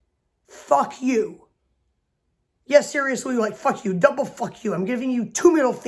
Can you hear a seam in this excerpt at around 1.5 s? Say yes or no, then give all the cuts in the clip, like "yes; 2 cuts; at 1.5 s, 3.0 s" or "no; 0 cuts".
no; 0 cuts